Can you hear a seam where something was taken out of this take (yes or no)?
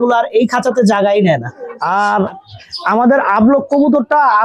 yes